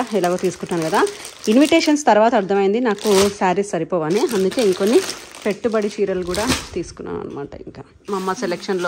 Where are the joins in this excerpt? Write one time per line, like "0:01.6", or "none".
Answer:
0:08.0